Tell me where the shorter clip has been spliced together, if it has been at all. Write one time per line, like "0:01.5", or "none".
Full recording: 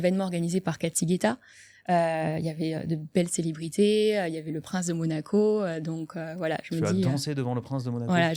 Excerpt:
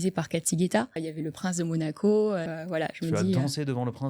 0:01.1
0:02.5